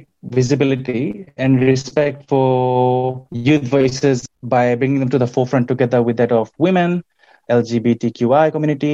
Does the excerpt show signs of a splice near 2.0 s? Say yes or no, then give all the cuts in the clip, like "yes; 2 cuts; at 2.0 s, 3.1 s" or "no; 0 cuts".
no; 3 cuts; at 3.3 s, 4.2 s, 7.5 s